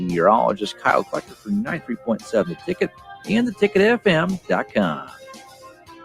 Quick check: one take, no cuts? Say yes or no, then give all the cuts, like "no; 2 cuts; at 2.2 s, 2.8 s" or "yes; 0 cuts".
no; 1 cut; at 5.1 s